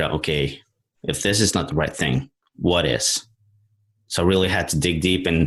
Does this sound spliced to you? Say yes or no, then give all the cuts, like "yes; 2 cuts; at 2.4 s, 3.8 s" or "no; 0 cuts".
no; 0 cuts